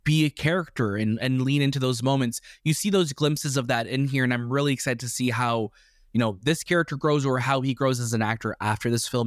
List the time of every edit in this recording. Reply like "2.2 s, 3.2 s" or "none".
none